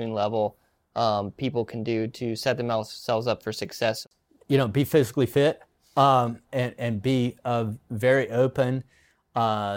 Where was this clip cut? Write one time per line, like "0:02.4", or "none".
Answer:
0:04.0